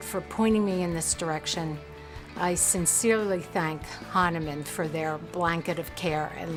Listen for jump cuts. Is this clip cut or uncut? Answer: uncut